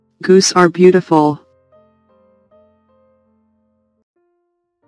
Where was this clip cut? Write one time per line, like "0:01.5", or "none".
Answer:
0:01.5